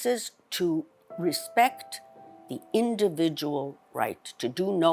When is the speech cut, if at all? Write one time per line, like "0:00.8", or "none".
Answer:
0:01.0